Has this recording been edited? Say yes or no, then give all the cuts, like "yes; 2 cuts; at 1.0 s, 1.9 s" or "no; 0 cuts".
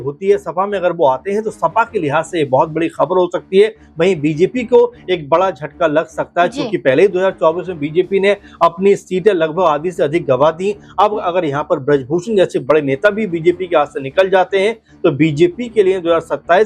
no; 0 cuts